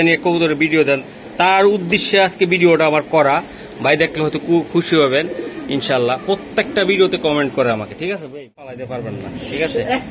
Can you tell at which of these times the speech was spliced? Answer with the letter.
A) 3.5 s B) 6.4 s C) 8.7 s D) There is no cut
C